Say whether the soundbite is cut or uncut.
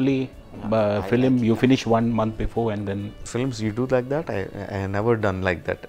uncut